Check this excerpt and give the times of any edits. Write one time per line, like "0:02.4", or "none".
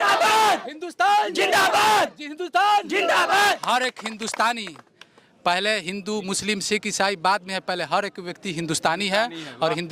0:03.6

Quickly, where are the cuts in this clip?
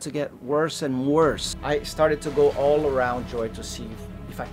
0:01.5

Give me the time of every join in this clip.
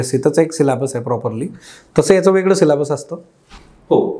none

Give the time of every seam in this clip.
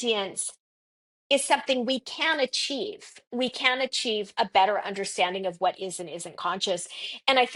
none

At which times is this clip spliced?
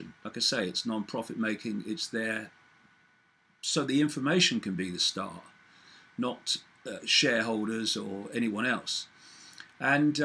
0:06.8

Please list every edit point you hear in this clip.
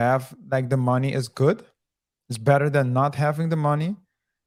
none

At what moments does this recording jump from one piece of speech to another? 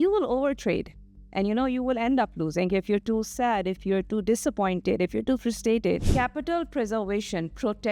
0:06.1

